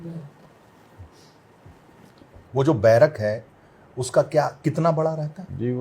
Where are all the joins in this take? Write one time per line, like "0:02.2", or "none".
0:02.4